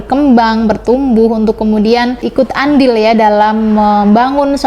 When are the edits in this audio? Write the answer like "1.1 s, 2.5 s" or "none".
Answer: 2.2 s